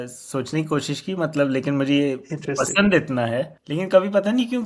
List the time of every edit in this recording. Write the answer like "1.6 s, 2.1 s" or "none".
3.6 s